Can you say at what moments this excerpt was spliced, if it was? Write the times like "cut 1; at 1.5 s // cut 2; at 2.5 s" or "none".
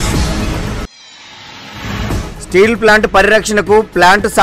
cut 1; at 0.7 s // cut 2; at 2.0 s